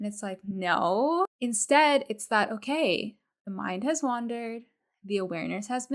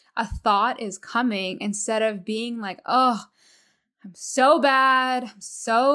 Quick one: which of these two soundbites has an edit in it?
first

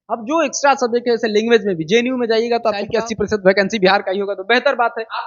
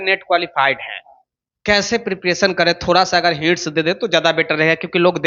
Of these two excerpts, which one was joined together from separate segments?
first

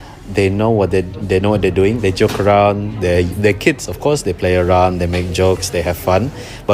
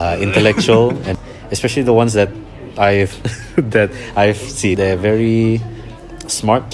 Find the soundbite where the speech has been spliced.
second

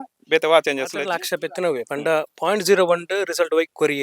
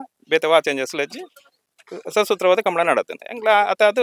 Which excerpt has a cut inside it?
first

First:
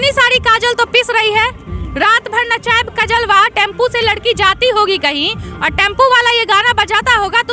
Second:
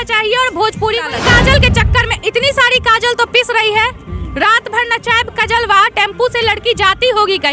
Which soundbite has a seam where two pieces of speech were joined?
second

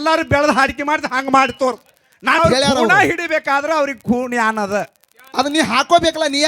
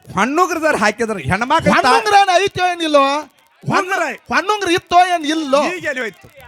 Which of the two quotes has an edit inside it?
first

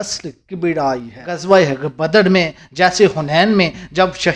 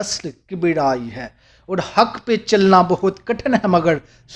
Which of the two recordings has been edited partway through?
first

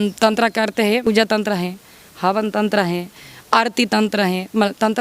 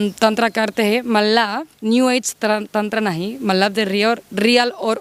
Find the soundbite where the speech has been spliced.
first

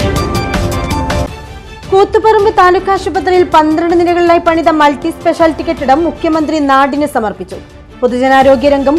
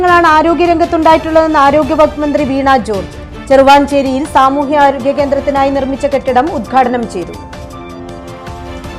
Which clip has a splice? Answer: first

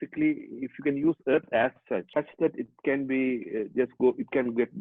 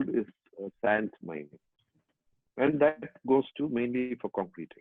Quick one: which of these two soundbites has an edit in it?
first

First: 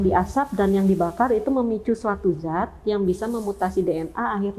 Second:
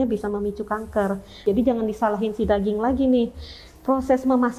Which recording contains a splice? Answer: second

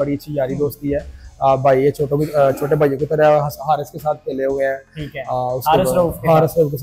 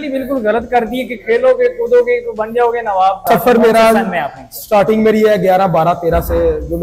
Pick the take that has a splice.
second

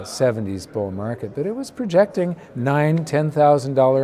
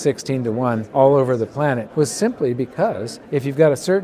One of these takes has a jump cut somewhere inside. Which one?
second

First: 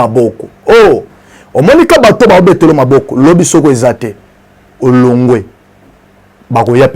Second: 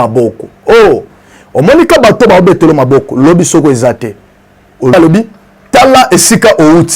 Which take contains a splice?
second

